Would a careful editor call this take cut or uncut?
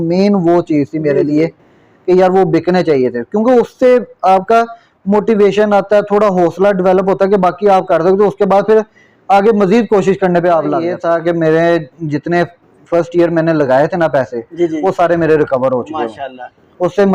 cut